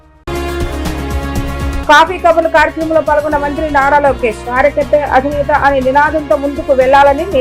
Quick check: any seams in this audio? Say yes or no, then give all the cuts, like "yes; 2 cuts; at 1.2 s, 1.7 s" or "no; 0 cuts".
no; 0 cuts